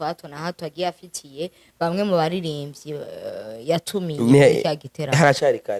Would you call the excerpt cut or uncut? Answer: uncut